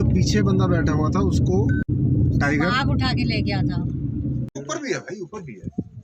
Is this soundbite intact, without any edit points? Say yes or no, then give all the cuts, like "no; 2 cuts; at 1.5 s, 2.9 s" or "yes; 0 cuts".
no; 2 cuts; at 1.9 s, 4.6 s